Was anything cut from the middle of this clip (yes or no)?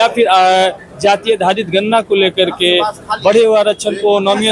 no